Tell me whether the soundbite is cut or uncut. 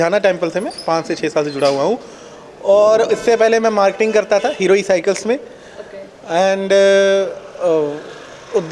uncut